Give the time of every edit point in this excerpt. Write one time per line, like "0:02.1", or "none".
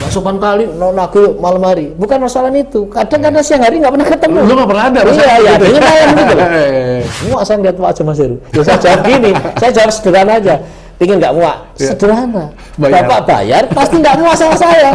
0:07.0